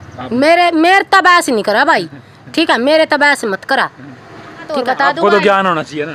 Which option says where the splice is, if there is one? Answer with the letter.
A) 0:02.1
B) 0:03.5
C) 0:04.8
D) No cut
C